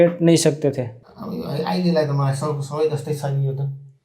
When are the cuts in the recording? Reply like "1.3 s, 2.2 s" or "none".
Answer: 0.9 s